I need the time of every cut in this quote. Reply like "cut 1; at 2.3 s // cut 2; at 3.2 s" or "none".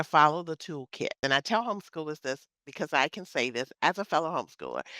cut 1; at 1.2 s